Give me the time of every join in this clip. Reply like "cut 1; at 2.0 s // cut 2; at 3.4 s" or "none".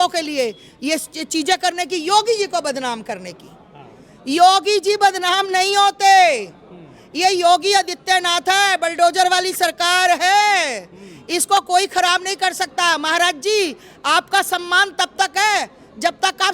none